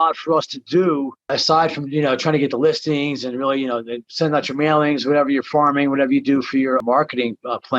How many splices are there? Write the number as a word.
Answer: two